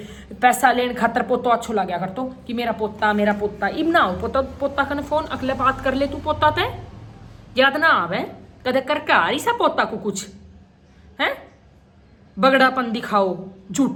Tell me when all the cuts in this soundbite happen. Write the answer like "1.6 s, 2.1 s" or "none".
none